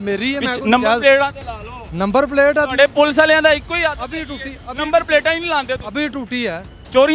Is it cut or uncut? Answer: uncut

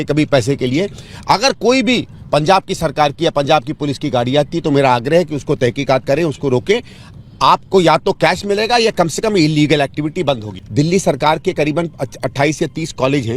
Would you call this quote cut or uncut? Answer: cut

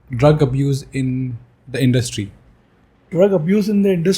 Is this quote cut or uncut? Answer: uncut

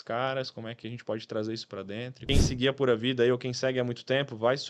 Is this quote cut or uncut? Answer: cut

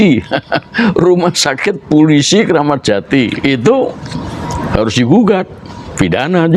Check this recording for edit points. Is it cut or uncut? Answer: uncut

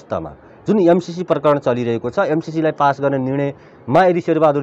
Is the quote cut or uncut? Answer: uncut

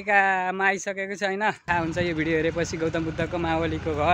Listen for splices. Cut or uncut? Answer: cut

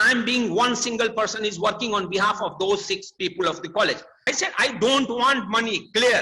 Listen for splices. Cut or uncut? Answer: cut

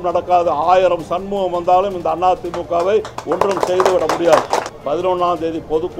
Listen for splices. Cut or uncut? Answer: cut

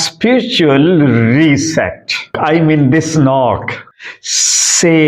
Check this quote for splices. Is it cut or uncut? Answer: cut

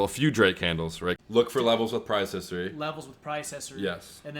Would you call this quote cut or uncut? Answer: cut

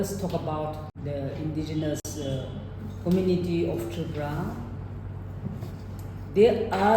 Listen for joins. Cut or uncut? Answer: cut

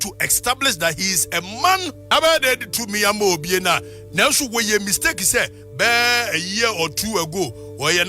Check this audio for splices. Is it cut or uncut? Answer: cut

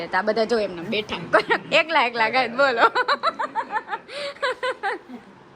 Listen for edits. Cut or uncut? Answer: uncut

